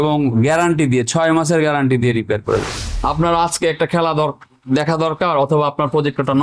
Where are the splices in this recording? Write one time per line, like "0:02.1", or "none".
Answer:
0:02.8